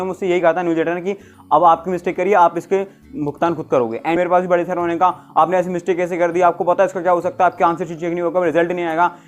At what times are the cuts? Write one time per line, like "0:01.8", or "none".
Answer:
0:04.2